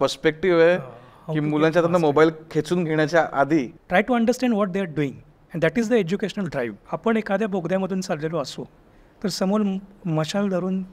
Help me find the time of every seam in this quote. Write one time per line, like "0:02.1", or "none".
0:03.8
0:06.8